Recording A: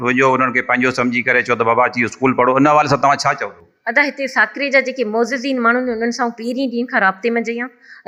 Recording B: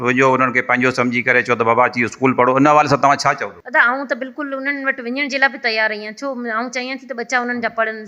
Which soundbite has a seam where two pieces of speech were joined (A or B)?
B